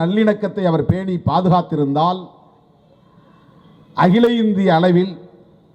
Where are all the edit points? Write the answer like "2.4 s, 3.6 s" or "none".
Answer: none